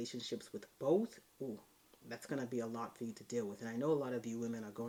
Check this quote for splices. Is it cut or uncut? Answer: uncut